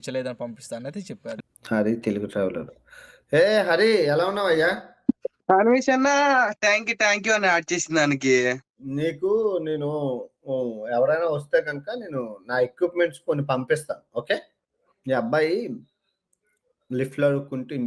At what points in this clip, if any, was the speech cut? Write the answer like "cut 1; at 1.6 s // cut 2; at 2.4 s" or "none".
cut 1; at 1.4 s